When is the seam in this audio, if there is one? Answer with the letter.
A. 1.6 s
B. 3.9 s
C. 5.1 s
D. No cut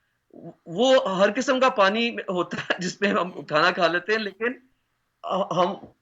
D